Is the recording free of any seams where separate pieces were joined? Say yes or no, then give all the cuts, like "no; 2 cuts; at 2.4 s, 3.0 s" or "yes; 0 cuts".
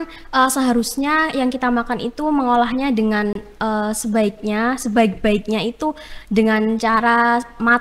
yes; 0 cuts